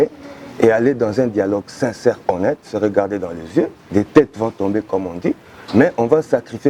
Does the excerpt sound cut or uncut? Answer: cut